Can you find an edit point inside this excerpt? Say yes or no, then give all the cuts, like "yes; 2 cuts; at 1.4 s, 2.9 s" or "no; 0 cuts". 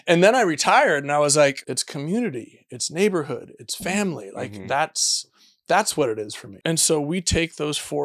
yes; 2 cuts; at 1.6 s, 6.4 s